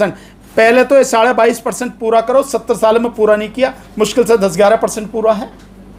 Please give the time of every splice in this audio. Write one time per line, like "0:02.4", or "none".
none

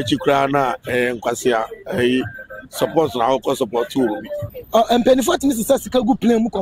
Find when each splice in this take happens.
0:04.5

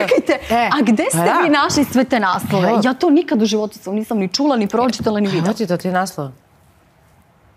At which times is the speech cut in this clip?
none

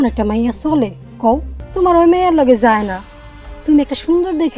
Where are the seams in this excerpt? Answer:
0:01.6

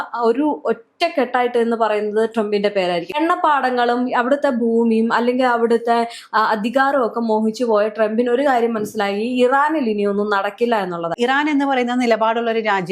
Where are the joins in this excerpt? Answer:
0:03.2
0:11.1

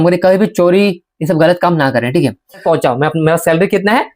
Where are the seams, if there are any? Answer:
0:02.6

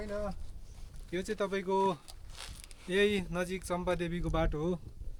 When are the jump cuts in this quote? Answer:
none

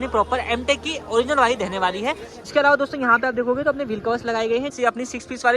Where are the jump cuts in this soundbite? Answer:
0:02.3
0:04.7

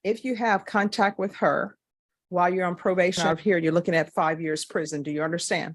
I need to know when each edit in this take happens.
0:03.2

